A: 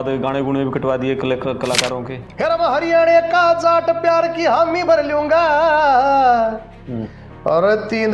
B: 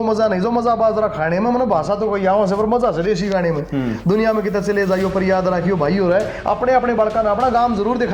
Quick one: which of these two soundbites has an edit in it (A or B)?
A